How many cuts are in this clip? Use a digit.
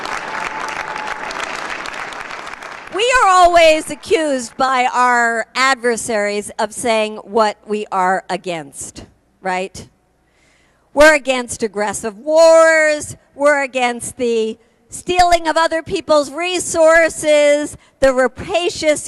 2